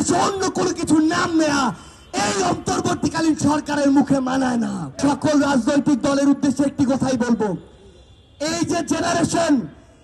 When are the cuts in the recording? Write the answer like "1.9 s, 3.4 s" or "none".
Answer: 4.9 s